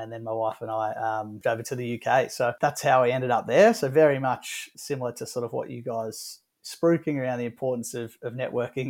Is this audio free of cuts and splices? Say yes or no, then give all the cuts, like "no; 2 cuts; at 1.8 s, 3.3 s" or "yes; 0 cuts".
no; 3 cuts; at 1.3 s, 2.6 s, 4.7 s